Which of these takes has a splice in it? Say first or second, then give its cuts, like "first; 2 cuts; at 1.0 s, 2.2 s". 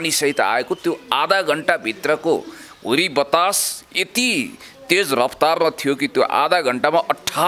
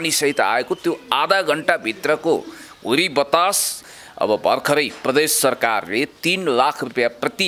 second; 1 cut; at 4.0 s